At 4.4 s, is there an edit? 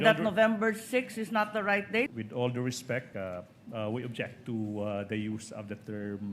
no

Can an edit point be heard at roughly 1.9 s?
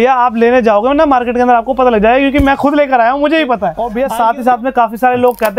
no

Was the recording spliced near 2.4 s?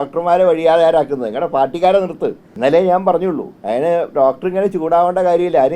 yes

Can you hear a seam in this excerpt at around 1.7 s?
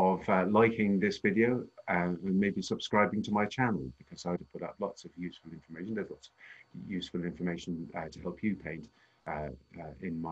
no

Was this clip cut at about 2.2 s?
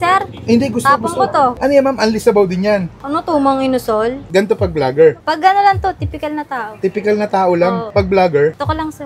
no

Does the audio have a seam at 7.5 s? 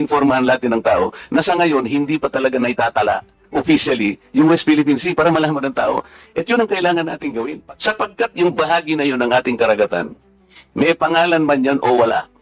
yes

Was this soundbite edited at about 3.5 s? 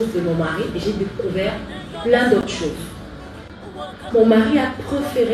yes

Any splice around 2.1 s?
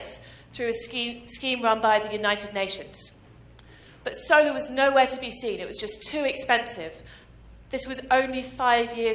no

